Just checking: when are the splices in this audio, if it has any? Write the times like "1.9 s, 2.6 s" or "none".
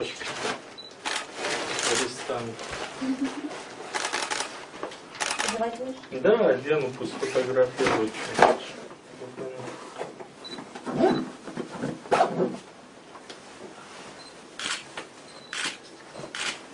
4.7 s